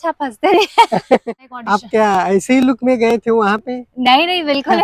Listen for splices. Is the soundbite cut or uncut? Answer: cut